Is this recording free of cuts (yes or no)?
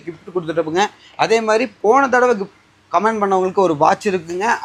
yes